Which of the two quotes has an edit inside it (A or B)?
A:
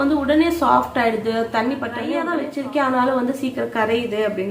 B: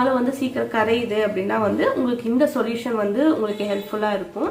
A